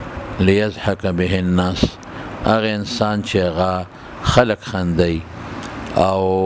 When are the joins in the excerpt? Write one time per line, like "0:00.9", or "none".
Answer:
none